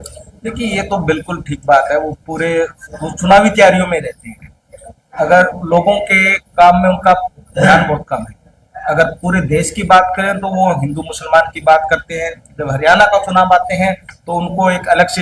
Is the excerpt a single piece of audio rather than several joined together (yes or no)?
yes